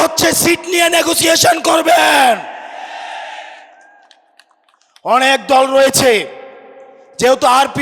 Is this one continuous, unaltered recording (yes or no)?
yes